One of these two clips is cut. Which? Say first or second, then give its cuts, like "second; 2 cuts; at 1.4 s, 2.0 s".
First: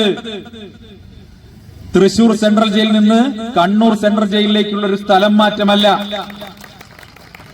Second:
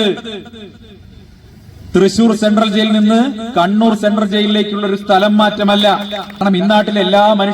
second; 1 cut; at 6.4 s